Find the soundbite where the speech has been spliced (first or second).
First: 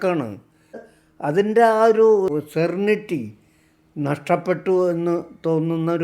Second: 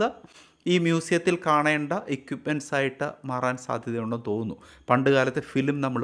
first